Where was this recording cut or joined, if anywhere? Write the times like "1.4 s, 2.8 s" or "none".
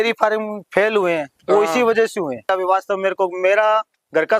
2.5 s

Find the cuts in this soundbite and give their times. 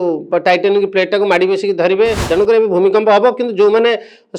2.3 s

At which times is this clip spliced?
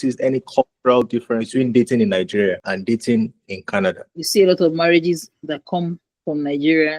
1.1 s, 2.7 s, 4.1 s

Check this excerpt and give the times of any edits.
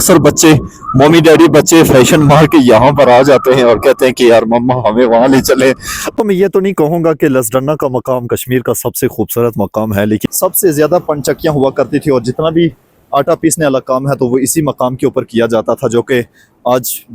6.1 s, 10.2 s

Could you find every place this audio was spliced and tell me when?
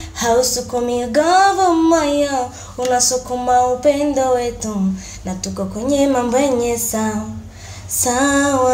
none

